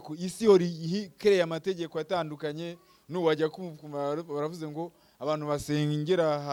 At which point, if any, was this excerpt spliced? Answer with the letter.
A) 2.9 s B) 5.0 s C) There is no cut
C